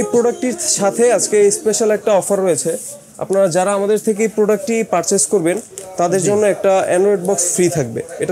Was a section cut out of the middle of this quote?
no; 0 cuts

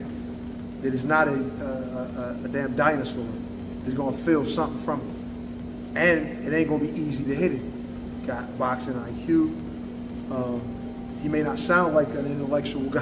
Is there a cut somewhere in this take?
no; 0 cuts

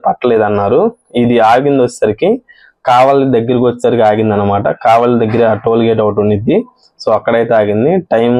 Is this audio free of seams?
yes; 0 cuts

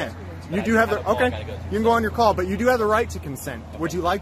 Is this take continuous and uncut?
yes; 0 cuts

